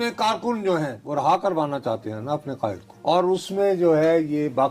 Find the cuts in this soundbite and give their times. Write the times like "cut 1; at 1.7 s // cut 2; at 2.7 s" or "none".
cut 1; at 1.0 s // cut 2; at 2.9 s